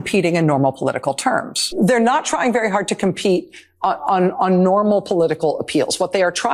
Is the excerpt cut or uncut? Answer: cut